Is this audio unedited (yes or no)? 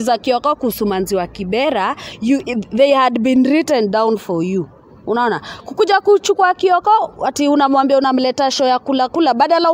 yes